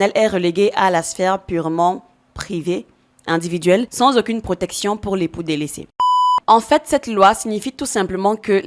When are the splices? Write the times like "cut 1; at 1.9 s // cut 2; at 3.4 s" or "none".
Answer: cut 1; at 6.0 s